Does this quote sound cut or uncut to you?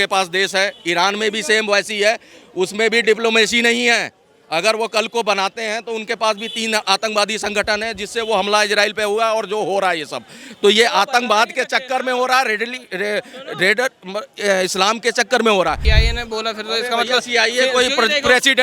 cut